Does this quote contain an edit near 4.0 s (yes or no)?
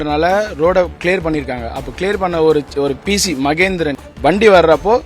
yes